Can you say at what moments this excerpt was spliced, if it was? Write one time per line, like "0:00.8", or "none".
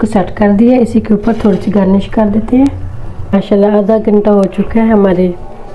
0:03.3